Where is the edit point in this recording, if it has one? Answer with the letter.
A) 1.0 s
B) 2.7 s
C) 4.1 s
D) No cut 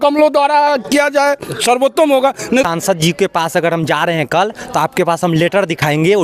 B